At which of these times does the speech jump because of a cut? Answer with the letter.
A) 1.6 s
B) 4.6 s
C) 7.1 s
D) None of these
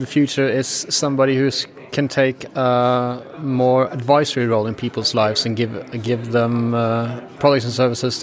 D